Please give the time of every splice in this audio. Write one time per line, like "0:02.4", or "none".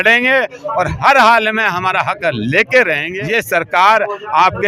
0:03.1